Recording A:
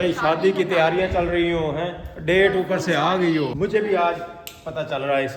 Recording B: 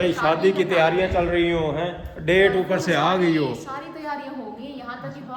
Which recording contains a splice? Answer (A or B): A